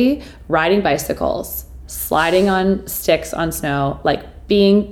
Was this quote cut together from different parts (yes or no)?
no